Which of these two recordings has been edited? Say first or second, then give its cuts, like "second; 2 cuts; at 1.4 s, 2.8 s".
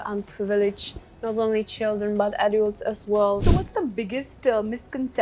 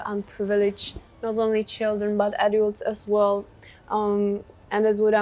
first; 1 cut; at 3.4 s